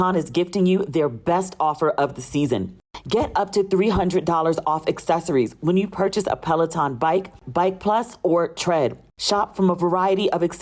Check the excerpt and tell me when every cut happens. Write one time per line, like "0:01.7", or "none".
none